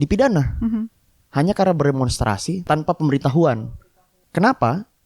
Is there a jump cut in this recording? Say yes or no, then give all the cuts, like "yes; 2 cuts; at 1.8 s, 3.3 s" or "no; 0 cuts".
yes; 2 cuts; at 2.7 s, 3.6 s